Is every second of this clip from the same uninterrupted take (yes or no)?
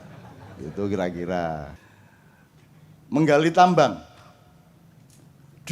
no